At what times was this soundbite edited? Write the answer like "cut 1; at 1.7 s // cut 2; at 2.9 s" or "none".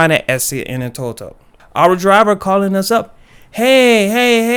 none